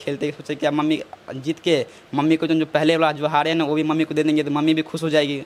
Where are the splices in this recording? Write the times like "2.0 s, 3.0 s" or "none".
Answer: none

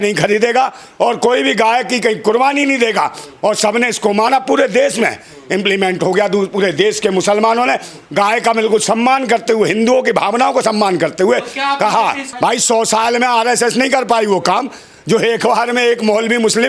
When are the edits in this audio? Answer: 12.3 s

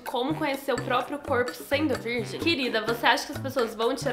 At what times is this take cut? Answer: 2.3 s

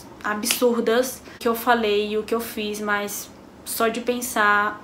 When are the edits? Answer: 1.4 s

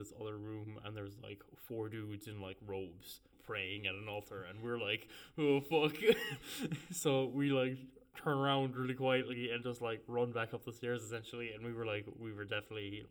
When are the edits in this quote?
none

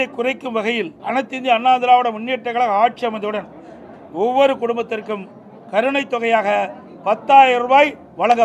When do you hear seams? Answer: 1.0 s

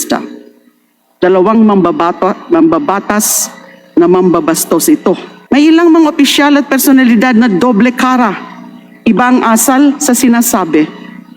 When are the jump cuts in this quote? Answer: 5.3 s

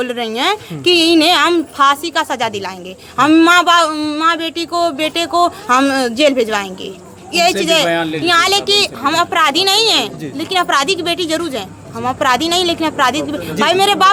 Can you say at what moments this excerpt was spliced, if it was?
none

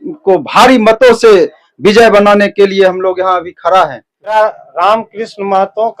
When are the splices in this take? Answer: 4.3 s

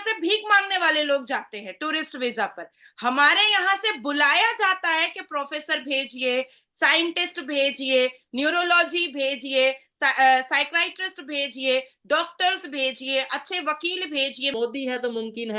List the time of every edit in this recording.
14.5 s

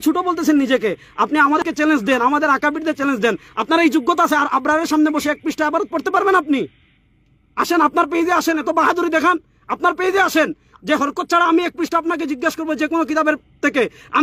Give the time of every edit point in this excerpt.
1.6 s

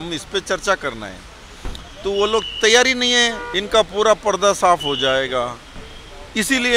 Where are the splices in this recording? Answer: 3.5 s

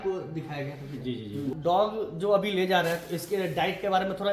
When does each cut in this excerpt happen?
1.5 s

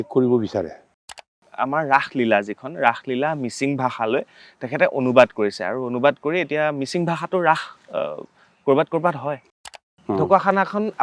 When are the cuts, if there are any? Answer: 1.5 s, 9.6 s

